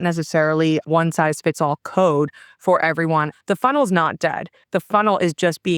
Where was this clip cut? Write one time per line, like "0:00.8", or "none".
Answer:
0:03.3